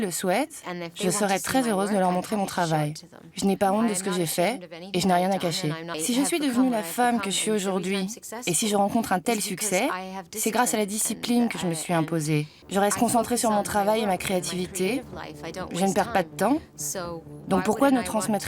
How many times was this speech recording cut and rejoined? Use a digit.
2